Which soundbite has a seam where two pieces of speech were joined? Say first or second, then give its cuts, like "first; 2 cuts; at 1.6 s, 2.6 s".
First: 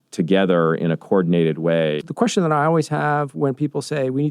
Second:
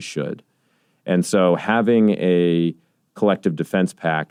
first; 1 cut; at 2.0 s